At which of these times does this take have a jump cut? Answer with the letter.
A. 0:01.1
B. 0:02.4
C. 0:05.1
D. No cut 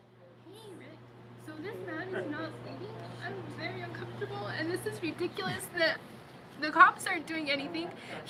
D